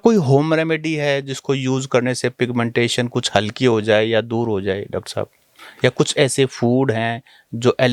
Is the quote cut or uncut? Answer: uncut